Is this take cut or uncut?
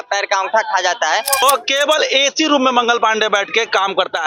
cut